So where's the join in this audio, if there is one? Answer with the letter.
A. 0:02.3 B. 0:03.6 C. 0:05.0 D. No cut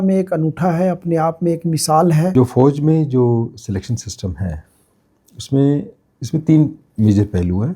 A